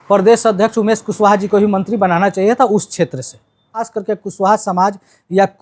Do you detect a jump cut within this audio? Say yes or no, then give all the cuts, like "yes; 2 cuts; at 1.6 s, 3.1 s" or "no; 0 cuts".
yes; 1 cut; at 3.9 s